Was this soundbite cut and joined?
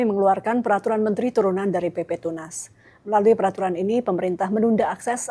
no; 0 cuts

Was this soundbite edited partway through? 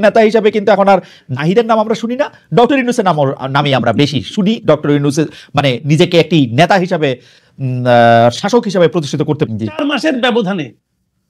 yes; 1 cut; at 9.5 s

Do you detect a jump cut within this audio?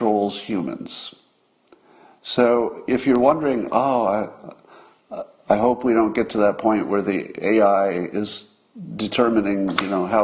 no; 0 cuts

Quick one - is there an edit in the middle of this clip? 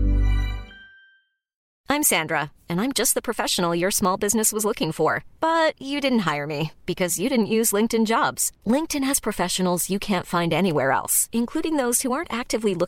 yes; 1 cut; at 1.6 s

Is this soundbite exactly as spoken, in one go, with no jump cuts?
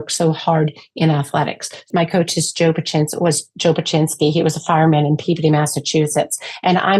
no; 1 cut; at 1.9 s

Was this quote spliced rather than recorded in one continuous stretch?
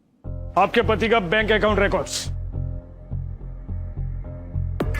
no; 0 cuts

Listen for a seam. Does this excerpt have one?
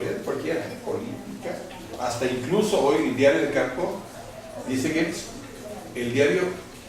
yes; 1 cut; at 4.2 s

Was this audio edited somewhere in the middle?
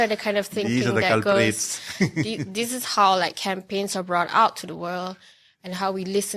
no; 0 cuts

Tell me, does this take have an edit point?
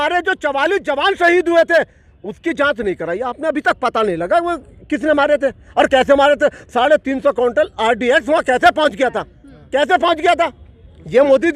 no; 0 cuts

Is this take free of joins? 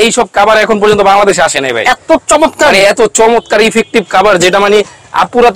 yes; 0 cuts

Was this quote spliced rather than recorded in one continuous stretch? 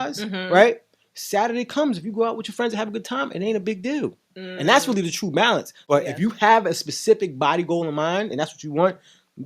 yes; 1 cut; at 5.8 s

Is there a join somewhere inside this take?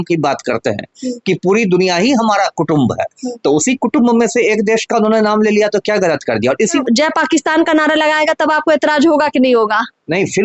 yes; 1 cut; at 6.8 s

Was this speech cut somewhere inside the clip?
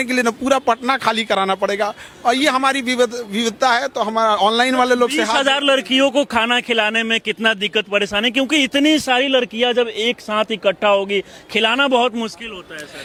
no; 0 cuts

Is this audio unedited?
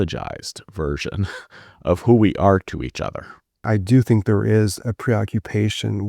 no; 1 cut; at 3.7 s

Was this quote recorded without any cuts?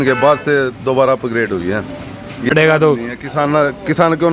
no; 1 cut; at 2.5 s

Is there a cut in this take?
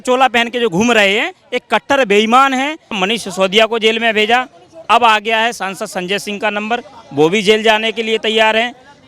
yes; 1 cut; at 3.0 s

